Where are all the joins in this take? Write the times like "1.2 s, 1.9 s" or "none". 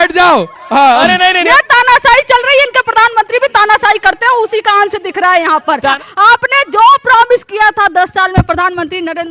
1.3 s, 6.0 s

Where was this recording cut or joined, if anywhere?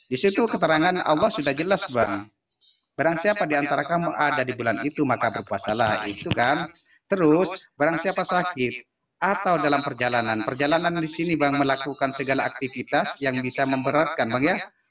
none

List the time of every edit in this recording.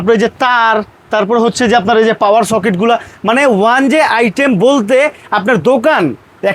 none

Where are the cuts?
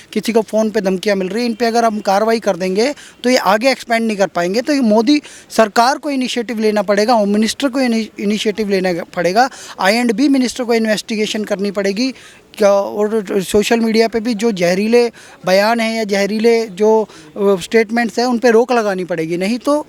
none

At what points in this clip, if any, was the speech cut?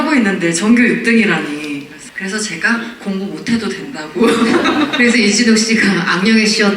2.0 s

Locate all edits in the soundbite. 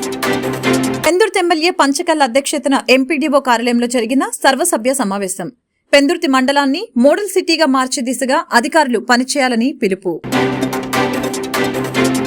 1.0 s

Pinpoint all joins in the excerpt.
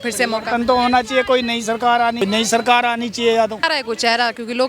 2.2 s, 3.6 s

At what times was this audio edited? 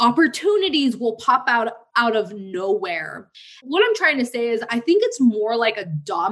3.5 s, 4.7 s

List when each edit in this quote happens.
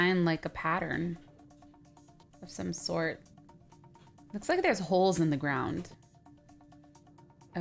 5.4 s

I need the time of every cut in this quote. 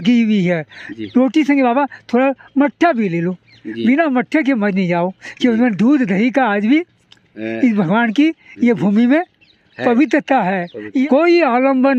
11.1 s

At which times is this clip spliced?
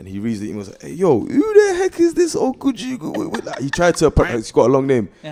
none

